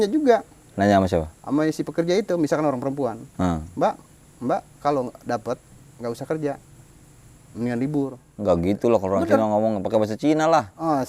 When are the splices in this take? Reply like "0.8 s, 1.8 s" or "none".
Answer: none